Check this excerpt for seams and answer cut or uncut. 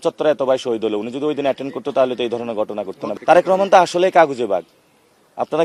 uncut